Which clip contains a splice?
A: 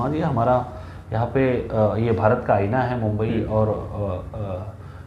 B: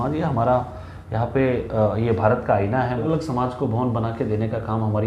B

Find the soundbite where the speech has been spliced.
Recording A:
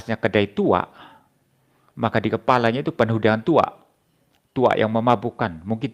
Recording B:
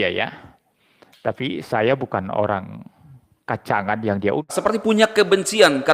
B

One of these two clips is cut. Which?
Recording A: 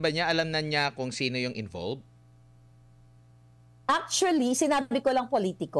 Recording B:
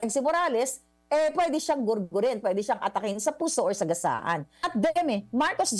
B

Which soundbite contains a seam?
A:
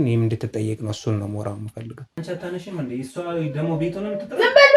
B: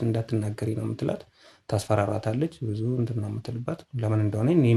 A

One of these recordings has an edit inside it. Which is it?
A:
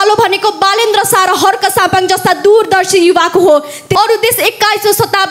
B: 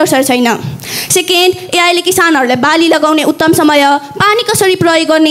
A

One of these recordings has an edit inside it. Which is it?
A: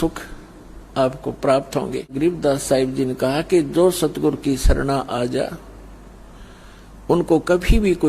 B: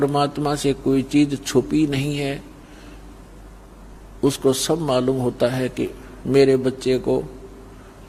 A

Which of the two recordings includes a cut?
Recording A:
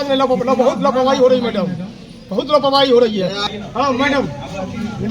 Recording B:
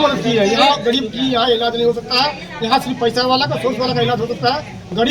A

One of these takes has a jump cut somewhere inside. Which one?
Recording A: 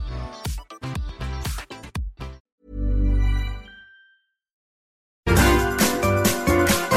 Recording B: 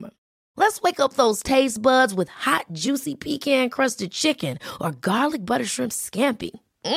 A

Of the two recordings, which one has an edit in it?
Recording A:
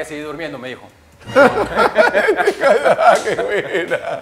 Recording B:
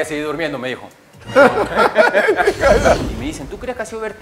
B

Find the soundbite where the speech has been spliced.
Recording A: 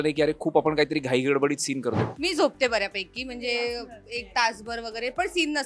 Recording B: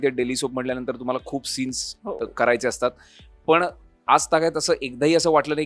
A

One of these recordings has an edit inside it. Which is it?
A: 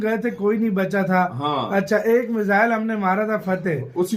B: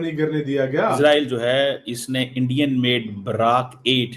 B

